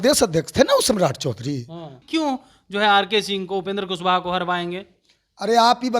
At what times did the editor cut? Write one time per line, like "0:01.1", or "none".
0:02.0